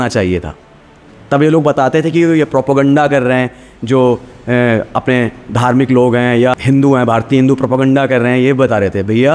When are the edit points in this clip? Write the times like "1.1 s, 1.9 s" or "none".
6.5 s